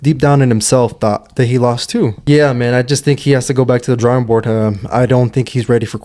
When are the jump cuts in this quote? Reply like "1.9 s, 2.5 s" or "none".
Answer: 2.2 s